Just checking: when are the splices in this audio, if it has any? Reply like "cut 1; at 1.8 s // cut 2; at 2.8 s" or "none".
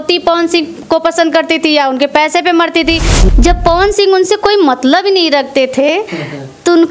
cut 1; at 3.1 s